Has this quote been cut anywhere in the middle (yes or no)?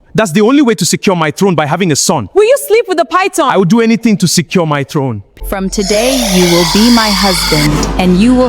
yes